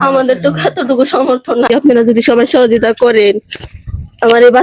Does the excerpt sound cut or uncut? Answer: cut